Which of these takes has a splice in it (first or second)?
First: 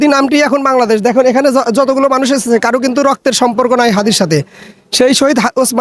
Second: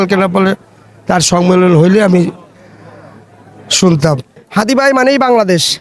second